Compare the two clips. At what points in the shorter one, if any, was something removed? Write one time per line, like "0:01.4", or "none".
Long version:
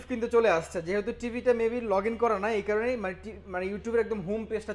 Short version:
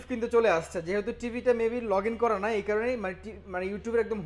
none